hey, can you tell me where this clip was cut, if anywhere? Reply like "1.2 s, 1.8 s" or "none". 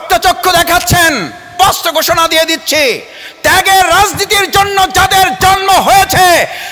1.5 s

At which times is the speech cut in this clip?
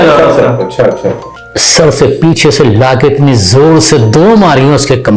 1.3 s

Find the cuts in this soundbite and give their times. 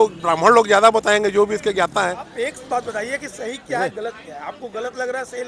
2.2 s

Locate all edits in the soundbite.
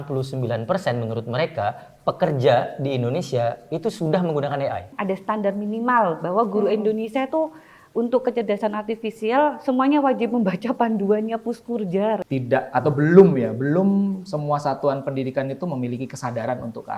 4.9 s, 12.2 s

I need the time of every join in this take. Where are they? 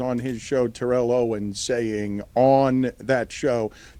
none

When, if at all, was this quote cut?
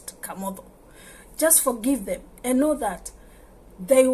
none

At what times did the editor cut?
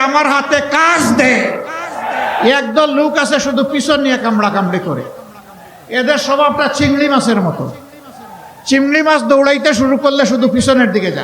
2.4 s

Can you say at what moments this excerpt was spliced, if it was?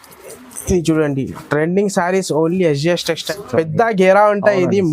3.3 s

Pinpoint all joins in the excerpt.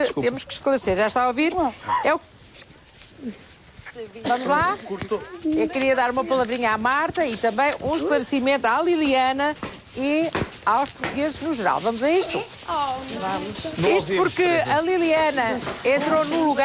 none

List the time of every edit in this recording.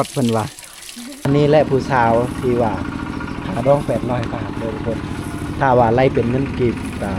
1.2 s

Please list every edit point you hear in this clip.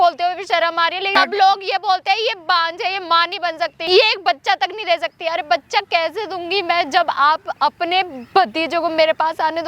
1.2 s, 3.8 s

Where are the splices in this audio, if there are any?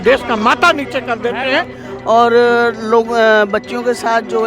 1.8 s

